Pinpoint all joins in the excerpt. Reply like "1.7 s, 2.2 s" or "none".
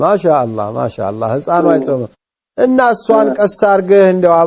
none